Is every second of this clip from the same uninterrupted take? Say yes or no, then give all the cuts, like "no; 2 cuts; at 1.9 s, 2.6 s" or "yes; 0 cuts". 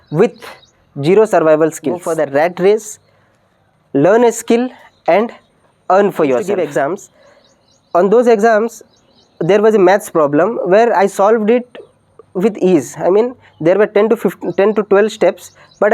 no; 2 cuts; at 2.0 s, 6.5 s